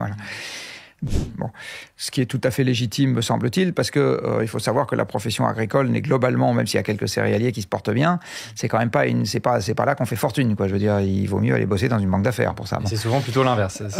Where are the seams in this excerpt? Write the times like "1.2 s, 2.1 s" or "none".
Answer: 0.9 s